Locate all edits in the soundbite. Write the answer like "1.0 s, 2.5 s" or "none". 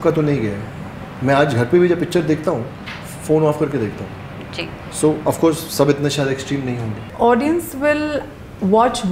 7.0 s